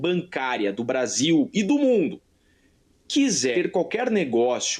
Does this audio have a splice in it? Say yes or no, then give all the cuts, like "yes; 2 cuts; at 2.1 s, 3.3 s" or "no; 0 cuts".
yes; 1 cut; at 3.5 s